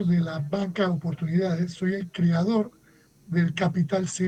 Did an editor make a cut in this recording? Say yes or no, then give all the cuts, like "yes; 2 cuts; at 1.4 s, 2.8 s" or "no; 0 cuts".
no; 0 cuts